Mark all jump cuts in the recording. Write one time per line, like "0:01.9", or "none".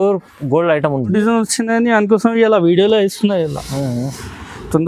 0:01.1

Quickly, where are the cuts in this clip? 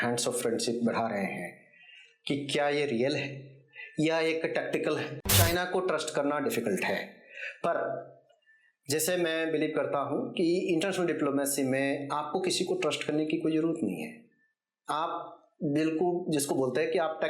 0:05.2

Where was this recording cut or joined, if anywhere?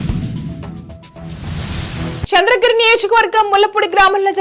none

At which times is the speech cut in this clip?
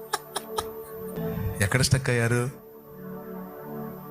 0:01.2

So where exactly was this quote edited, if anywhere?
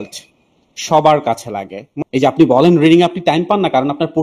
0:01.8

